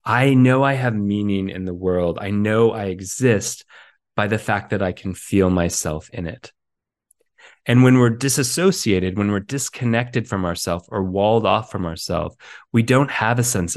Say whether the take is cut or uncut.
uncut